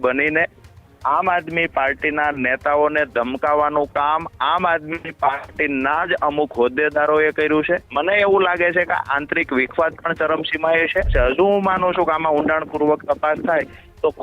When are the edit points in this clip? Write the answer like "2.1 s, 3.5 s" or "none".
7.9 s, 11.1 s